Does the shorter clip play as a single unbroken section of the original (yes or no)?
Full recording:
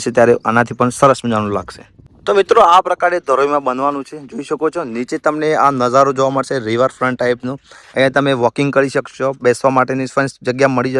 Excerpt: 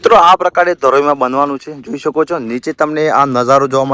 yes